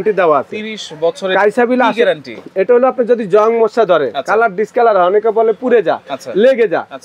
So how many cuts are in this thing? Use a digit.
0